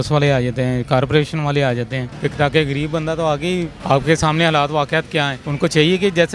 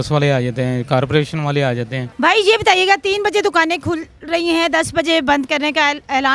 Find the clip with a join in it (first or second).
first